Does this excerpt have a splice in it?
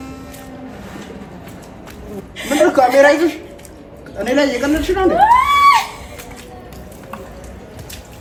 no; 0 cuts

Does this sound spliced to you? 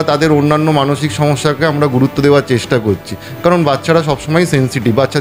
no; 0 cuts

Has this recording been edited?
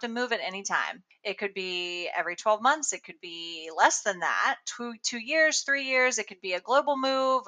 no; 0 cuts

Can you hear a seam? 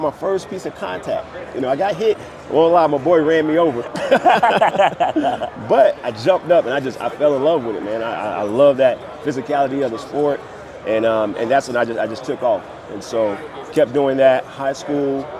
no; 0 cuts

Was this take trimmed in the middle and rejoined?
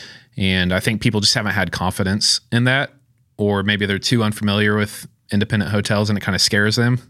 no; 0 cuts

